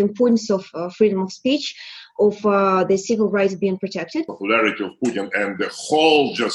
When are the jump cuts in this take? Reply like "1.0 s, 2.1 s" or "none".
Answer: 4.3 s